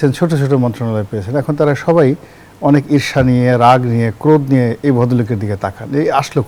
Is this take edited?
no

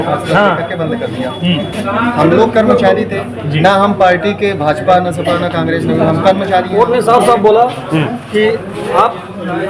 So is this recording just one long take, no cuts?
no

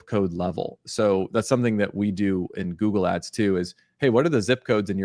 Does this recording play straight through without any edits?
yes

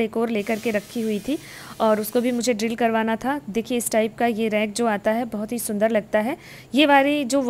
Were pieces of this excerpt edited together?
no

